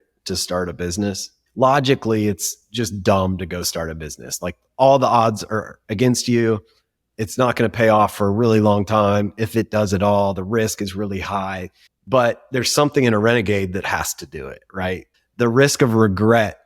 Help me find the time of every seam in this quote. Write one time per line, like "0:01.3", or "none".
0:01.4

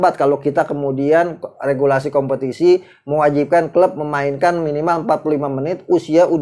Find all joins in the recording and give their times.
none

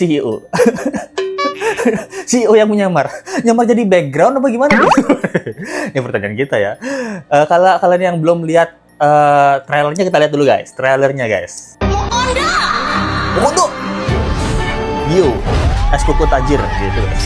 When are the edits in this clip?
none

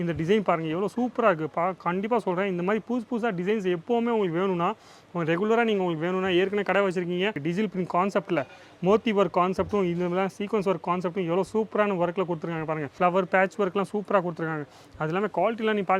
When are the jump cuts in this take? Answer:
0:07.4
0:12.9

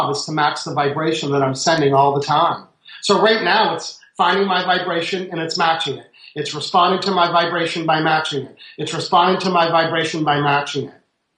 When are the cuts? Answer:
none

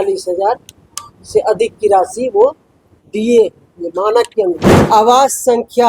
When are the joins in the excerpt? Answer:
0:04.7

